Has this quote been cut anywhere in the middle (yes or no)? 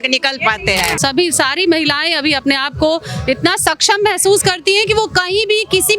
yes